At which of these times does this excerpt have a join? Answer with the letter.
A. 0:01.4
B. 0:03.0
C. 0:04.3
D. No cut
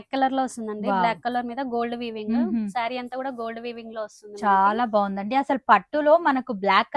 D